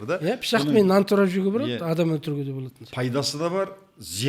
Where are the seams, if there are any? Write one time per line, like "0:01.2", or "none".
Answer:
none